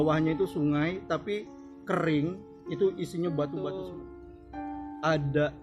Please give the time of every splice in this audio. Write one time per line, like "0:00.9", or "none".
0:03.9